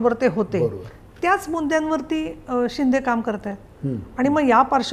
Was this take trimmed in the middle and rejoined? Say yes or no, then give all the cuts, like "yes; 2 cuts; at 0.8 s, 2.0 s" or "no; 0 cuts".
no; 0 cuts